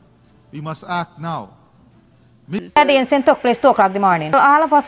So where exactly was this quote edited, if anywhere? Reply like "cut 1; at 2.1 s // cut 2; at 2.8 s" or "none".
cut 1; at 2.6 s